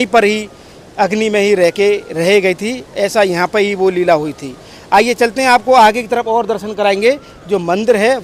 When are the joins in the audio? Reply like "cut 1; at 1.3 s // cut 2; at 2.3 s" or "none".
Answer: none